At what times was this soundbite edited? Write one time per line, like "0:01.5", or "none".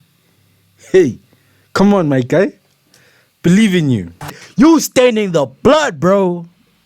0:04.4